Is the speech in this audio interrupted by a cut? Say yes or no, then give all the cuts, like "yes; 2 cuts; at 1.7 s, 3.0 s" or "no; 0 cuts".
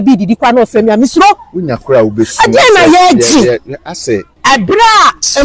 yes; 1 cut; at 4.3 s